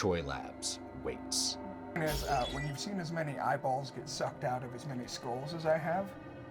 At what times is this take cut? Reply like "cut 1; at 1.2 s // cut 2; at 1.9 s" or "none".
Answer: cut 1; at 2.0 s